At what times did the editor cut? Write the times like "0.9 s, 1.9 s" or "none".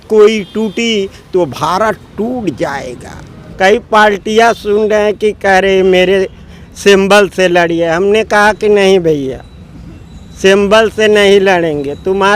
3.4 s